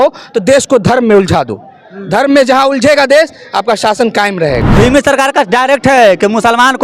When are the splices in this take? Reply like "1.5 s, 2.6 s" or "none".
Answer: 4.6 s